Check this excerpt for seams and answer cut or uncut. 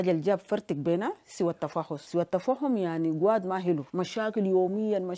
uncut